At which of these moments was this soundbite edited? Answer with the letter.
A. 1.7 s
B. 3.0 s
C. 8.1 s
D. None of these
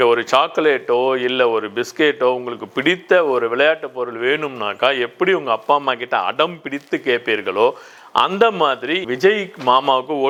D